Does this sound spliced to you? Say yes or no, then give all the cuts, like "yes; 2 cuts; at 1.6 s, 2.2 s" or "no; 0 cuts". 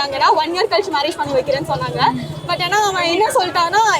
no; 0 cuts